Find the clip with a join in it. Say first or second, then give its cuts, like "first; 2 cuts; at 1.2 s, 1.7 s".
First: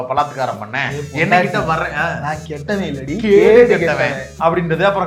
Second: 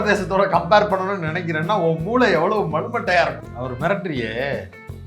second; 1 cut; at 3.4 s